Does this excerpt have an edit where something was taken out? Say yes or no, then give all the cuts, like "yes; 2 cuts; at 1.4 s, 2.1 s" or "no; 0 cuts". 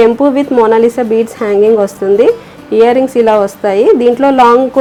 no; 0 cuts